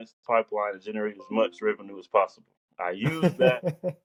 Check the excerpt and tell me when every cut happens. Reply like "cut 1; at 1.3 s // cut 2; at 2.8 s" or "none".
none